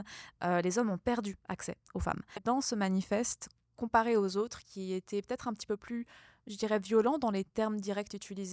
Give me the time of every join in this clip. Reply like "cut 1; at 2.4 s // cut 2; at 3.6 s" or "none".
cut 1; at 2.4 s

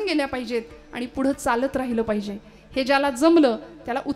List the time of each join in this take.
none

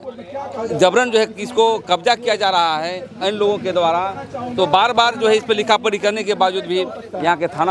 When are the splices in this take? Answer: none

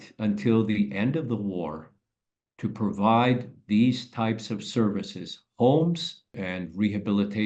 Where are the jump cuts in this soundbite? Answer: cut 1; at 6.3 s

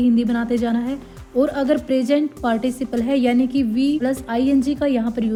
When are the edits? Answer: none

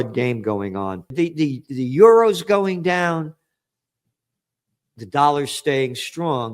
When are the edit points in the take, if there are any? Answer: cut 1; at 1.1 s

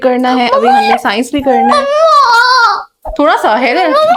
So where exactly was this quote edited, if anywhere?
none

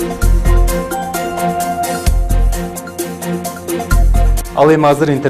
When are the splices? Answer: cut 1; at 1.1 s

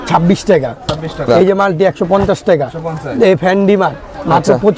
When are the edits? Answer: none

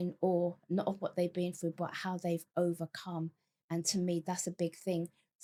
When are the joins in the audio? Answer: none

